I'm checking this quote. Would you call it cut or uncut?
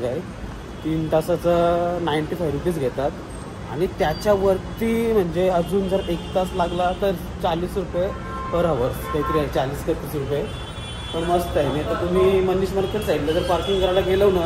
uncut